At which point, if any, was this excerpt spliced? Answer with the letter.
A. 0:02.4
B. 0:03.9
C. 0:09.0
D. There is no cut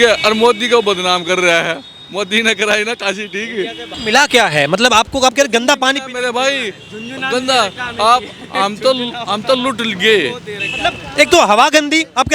B